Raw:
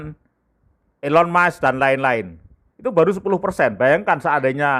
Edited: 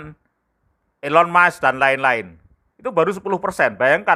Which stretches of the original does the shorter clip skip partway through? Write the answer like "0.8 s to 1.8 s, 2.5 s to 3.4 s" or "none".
none

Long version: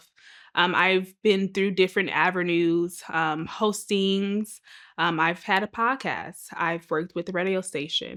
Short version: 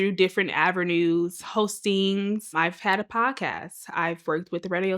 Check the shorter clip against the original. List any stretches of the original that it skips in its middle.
3.0 s to 3.5 s, 4.6 s to 5.2 s

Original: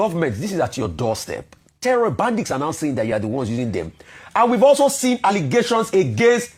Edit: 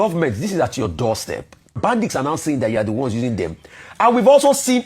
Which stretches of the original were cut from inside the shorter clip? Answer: 1.8 s to 2.1 s

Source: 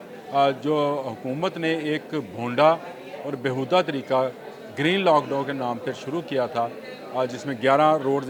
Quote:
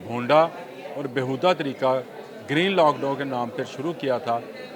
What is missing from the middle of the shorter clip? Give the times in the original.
none

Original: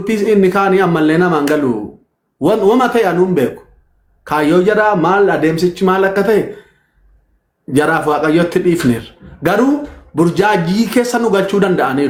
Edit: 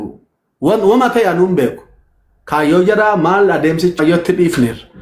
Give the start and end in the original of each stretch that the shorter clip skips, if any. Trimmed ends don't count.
5.8 s to 8.2 s

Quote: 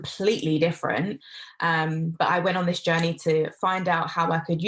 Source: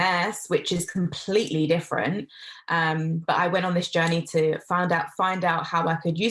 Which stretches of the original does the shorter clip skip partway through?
4.6 s to 5.1 s

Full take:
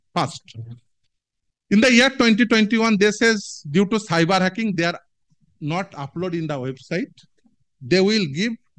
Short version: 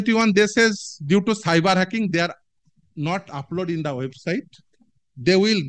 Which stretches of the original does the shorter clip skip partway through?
none

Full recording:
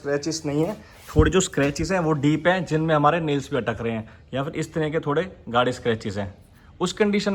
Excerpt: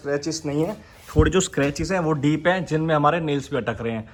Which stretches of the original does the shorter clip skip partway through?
none

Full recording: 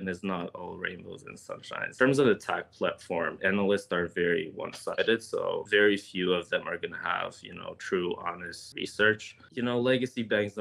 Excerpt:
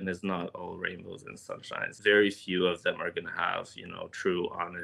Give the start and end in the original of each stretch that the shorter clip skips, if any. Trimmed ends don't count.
1.9 s to 5.6 s

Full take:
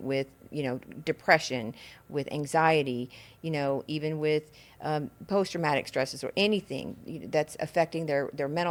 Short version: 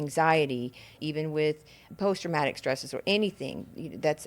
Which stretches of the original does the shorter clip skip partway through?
3.3 s to 3.8 s, 4.7 s to 5.1 s

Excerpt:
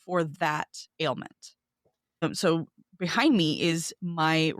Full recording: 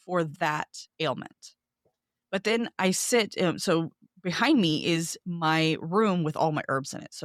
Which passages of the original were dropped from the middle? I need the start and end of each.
2.2 s to 3.5 s

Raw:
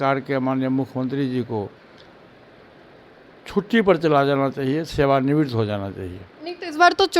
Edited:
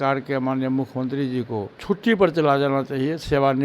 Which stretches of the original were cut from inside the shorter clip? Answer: 1.7 s to 3.4 s

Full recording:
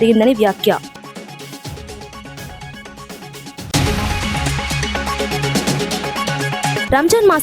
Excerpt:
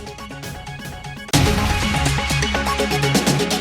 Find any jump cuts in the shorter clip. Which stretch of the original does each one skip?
3.0 s to 3.5 s

